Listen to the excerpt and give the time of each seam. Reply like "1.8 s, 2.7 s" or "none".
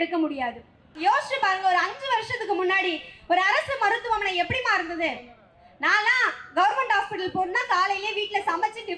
0.9 s